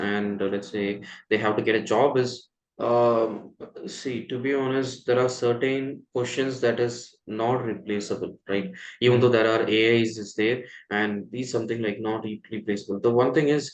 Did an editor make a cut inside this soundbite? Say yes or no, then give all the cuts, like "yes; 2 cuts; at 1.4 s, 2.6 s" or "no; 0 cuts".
no; 0 cuts